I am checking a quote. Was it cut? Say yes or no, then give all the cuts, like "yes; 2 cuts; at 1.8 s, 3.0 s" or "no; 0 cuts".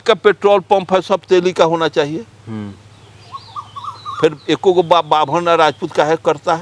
no; 0 cuts